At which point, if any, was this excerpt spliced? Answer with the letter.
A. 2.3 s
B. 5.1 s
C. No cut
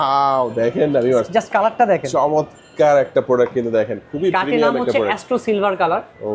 C